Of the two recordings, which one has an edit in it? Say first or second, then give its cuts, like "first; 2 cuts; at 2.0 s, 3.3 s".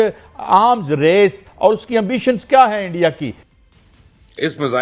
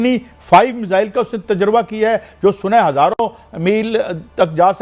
first; 1 cut; at 3.4 s